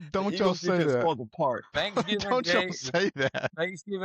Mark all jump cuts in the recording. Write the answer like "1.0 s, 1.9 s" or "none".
1.7 s